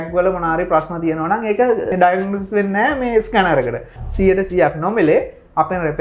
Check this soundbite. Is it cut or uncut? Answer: cut